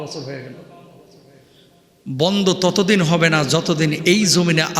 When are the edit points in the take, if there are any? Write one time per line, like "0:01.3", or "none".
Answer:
none